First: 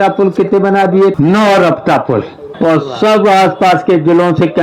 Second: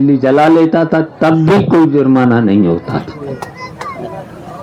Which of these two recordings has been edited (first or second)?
first